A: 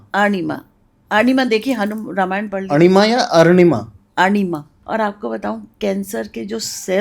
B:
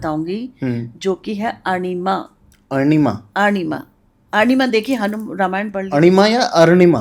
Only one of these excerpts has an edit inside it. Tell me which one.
A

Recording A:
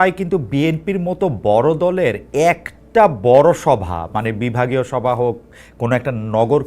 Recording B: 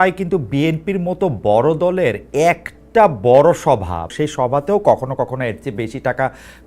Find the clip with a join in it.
B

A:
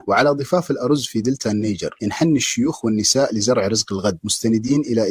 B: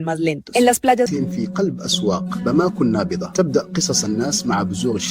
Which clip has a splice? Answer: B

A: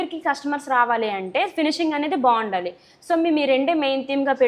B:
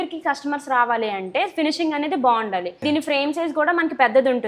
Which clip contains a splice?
B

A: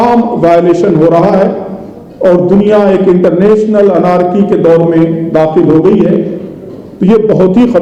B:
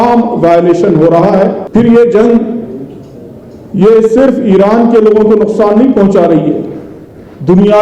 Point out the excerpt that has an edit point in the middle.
B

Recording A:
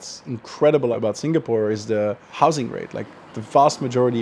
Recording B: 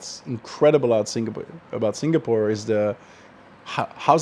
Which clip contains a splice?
A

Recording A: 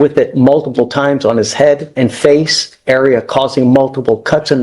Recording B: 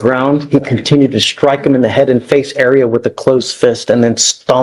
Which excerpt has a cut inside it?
A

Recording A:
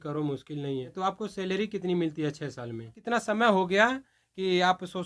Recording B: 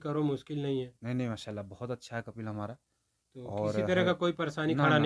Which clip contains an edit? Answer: A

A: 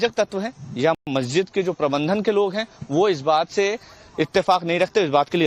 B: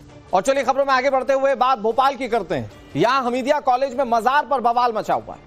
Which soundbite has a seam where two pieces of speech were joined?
B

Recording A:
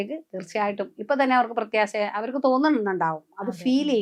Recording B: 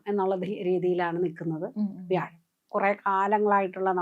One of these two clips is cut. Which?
B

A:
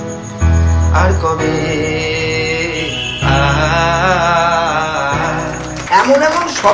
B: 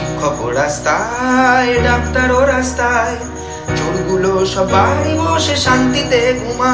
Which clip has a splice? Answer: A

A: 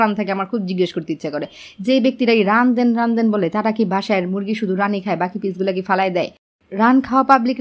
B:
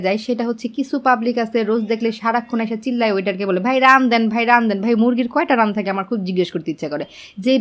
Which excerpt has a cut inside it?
A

